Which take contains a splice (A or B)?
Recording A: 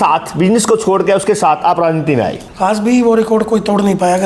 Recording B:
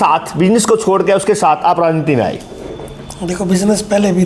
A